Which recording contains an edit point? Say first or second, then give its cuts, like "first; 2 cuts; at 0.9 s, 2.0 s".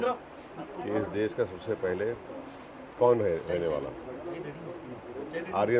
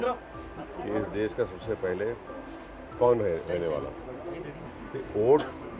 second; 1 cut; at 4.7 s